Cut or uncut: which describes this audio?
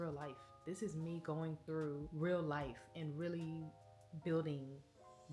cut